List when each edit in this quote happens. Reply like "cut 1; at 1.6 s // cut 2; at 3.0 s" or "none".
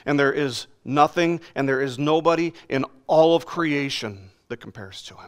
cut 1; at 4.3 s